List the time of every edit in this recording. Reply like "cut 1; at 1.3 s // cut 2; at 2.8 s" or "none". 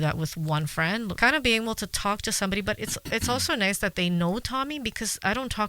cut 1; at 1.1 s